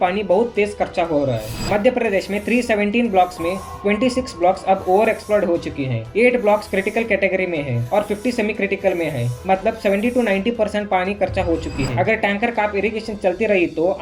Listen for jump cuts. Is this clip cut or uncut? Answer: uncut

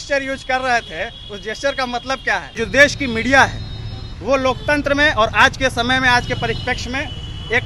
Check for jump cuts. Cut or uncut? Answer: cut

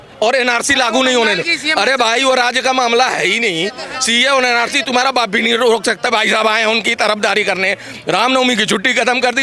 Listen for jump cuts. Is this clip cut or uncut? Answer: cut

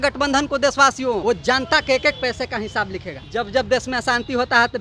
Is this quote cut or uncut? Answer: cut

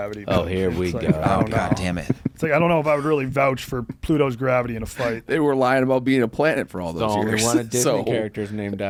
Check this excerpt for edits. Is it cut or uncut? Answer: uncut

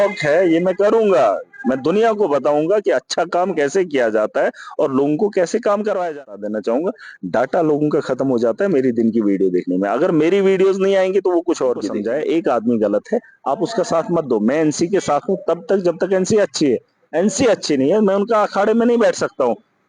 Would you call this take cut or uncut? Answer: cut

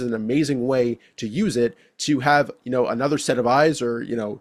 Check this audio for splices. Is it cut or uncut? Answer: uncut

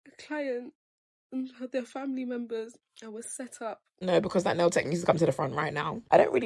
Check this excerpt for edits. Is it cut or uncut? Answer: cut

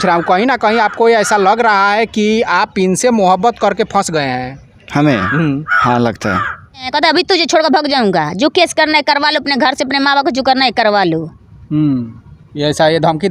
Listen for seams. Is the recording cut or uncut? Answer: cut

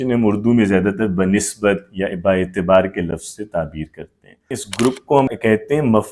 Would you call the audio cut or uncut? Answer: cut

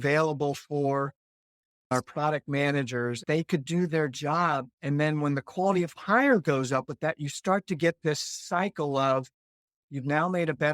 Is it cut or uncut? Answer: cut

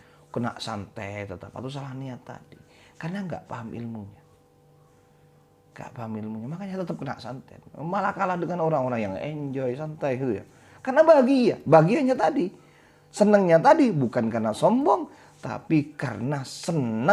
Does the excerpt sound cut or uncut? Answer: uncut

